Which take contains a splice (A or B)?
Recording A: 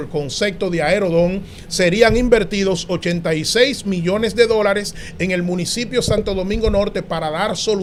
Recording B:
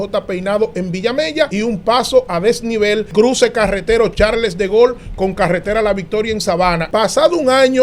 B